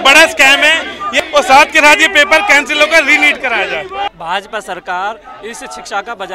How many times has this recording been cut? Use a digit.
2